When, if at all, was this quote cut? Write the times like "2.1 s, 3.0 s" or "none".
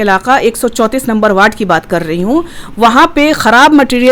none